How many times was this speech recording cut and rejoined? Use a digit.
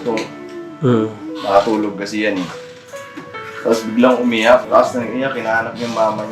1